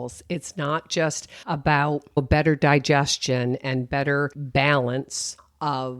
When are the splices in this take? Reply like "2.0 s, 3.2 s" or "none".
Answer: 1.3 s, 2.2 s, 4.4 s